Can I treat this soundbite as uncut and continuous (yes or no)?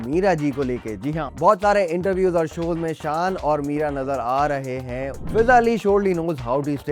no